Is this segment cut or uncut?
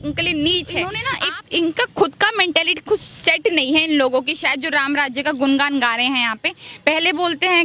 cut